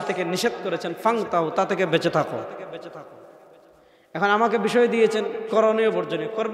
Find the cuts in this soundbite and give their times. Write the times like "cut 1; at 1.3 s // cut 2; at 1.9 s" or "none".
none